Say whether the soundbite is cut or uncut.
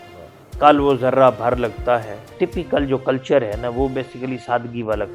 cut